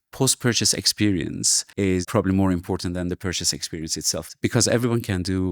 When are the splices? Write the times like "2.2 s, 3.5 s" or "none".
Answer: 2.0 s